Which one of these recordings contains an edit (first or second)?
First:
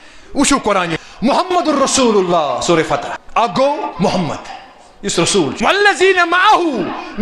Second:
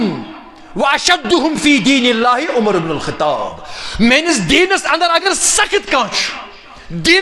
first